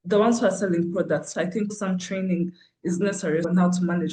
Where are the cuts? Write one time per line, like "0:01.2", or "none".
none